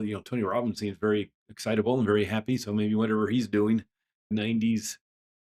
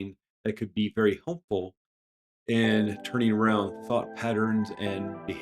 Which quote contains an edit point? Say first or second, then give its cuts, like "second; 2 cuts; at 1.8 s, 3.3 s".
first; 1 cut; at 4.2 s